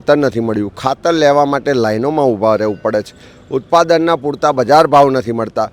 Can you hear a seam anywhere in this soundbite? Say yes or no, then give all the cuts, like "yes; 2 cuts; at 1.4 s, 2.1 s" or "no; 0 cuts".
no; 0 cuts